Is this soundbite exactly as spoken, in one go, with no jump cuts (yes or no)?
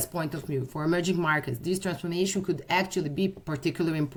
yes